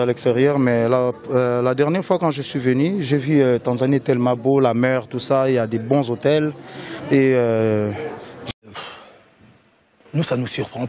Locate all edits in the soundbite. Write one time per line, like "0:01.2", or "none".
0:08.5